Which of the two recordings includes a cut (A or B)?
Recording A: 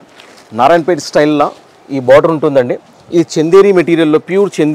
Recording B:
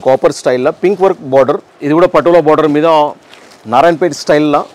B